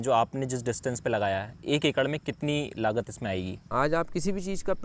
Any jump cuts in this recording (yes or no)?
yes